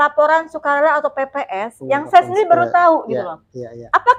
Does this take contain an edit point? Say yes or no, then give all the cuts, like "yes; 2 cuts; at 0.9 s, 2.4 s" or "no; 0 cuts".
no; 0 cuts